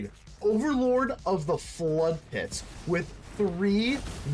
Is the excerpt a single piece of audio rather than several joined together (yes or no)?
yes